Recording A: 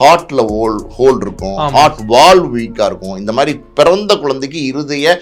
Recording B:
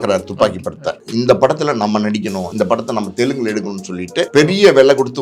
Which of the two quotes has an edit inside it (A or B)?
B